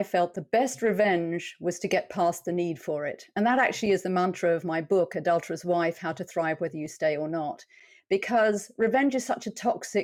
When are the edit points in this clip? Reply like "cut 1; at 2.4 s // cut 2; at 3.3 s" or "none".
none

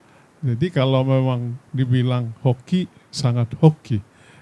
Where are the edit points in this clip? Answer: none

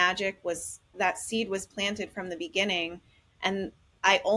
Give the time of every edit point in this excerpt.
cut 1; at 0.9 s

